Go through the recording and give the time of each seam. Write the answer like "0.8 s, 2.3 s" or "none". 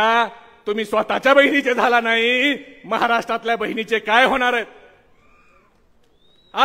none